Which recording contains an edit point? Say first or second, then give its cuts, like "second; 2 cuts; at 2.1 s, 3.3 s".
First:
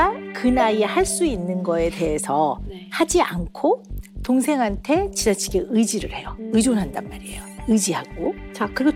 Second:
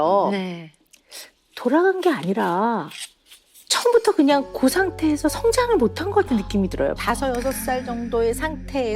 second; 1 cut; at 7.0 s